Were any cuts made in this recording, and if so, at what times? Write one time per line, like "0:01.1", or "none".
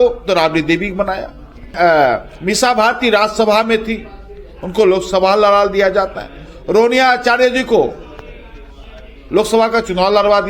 none